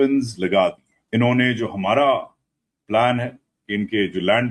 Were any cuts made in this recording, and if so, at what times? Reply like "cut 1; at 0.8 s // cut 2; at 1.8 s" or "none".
cut 1; at 0.9 s